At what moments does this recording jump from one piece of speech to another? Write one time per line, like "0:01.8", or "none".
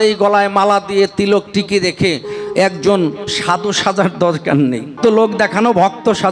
0:04.9